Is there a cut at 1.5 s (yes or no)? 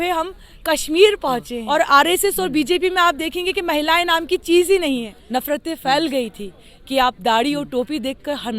yes